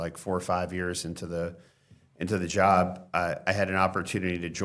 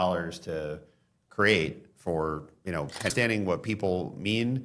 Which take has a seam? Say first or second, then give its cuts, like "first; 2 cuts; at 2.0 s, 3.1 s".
second; 1 cut; at 3.1 s